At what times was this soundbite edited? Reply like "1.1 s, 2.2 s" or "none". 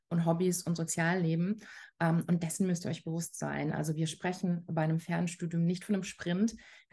none